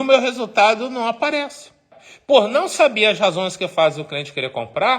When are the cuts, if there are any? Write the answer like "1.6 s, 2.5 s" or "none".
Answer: 1.9 s